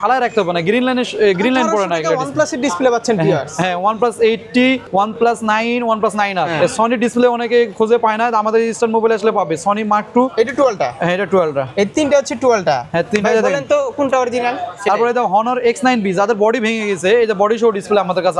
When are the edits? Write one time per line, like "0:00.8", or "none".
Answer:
0:04.8
0:06.5
0:10.3
0:14.7